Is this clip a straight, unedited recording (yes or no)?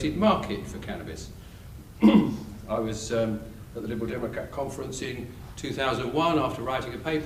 yes